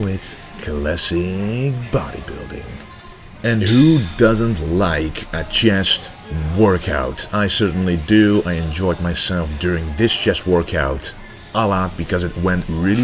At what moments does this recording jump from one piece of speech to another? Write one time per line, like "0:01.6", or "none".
0:08.7

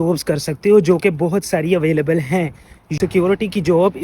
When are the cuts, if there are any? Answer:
0:03.0

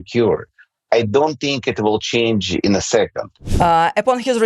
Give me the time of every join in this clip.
0:03.4

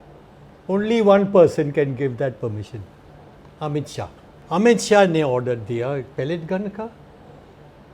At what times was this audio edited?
0:04.3

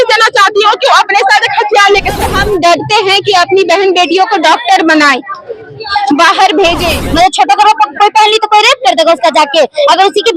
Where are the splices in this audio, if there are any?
0:02.3
0:07.0

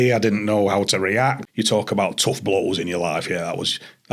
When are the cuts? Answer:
0:01.4

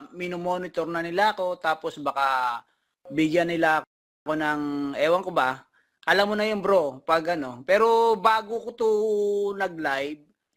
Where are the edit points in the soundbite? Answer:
none

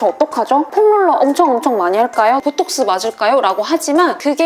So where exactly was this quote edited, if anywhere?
none

